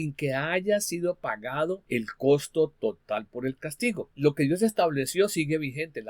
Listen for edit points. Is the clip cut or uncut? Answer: cut